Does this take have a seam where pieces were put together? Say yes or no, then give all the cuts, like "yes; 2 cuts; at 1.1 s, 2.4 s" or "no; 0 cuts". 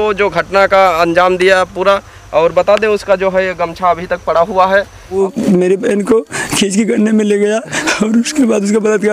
yes; 1 cut; at 5.2 s